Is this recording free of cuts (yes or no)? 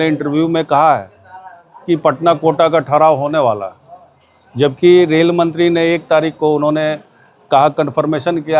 yes